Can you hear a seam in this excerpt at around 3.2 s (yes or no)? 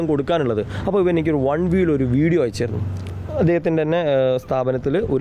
no